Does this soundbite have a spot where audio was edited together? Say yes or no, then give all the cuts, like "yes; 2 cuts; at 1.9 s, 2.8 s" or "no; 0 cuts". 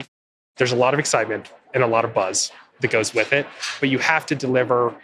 yes; 1 cut; at 3.8 s